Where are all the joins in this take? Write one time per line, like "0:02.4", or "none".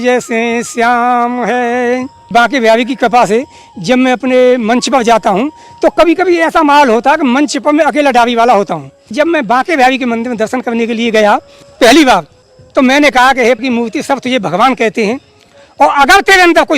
0:02.3
0:09.1
0:11.6